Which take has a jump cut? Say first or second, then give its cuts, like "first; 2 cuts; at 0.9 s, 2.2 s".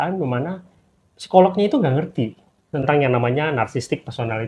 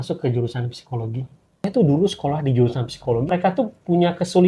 second; 2 cuts; at 1.6 s, 3.3 s